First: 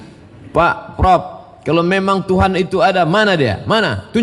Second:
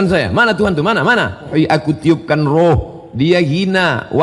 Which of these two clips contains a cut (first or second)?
second